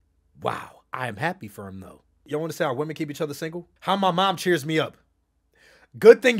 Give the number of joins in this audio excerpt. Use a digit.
2